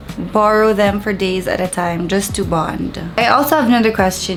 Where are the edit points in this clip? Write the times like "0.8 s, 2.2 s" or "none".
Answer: none